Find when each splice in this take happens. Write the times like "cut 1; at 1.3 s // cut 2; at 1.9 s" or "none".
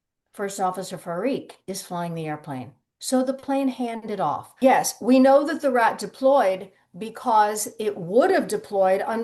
cut 1; at 4.5 s